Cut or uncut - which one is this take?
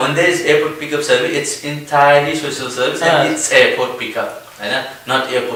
uncut